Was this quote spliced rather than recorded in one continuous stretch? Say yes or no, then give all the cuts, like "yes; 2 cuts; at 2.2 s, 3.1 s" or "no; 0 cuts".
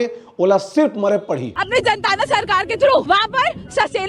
yes; 2 cuts; at 1.5 s, 3.0 s